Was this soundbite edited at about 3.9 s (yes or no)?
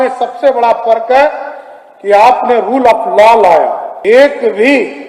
yes